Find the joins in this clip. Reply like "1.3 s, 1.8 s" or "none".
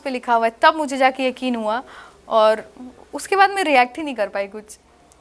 none